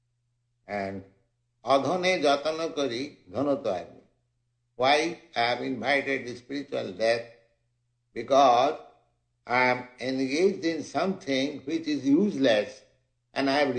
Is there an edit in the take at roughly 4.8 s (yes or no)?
yes